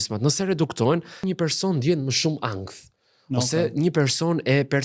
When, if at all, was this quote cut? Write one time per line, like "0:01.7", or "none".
0:01.3